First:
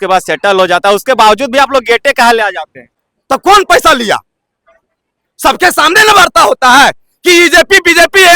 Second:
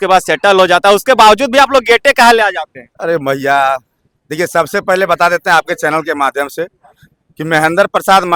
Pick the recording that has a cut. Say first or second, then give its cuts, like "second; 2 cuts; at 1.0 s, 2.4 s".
first; 1 cut; at 2.9 s